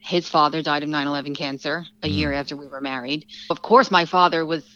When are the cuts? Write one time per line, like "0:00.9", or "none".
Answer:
0:03.5